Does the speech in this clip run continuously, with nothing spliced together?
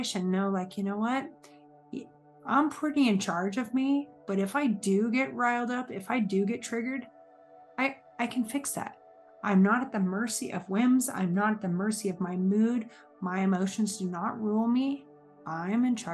yes; 0 cuts

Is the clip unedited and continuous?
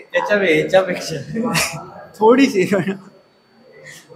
yes; 0 cuts

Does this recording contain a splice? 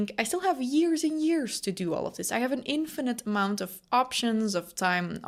no; 0 cuts

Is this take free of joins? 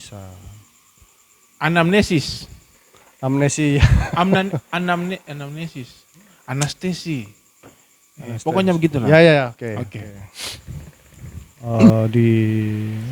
no; 1 cut; at 11.9 s

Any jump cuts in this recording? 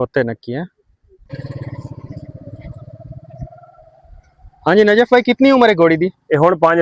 yes; 1 cut; at 1.3 s

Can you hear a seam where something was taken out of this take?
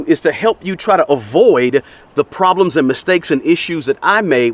no; 0 cuts

